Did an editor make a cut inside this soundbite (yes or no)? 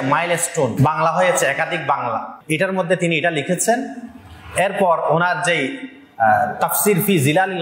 yes